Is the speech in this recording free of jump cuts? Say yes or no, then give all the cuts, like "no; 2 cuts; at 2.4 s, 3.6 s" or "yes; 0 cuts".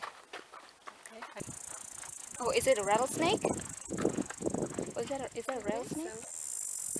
no; 1 cut; at 1.3 s